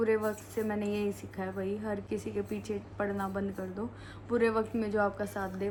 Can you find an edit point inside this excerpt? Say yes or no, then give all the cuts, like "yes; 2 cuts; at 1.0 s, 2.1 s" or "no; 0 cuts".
no; 0 cuts